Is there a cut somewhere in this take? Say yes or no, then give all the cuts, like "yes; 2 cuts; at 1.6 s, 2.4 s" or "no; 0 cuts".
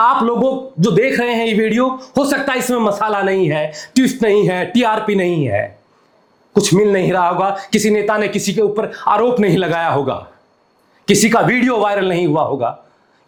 no; 0 cuts